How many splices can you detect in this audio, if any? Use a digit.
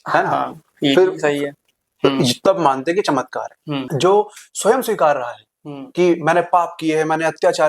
1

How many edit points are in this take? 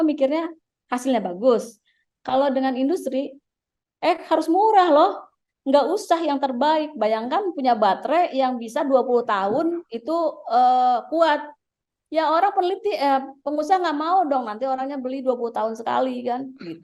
0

